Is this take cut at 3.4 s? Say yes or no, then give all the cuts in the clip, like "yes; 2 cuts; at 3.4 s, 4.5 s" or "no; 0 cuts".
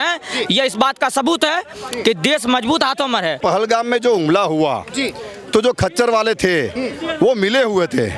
yes; 1 cut; at 3.4 s